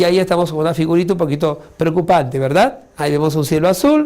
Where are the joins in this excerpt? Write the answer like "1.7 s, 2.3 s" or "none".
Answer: 2.3 s